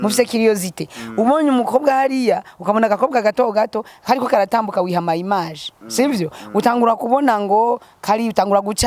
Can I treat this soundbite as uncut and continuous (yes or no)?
yes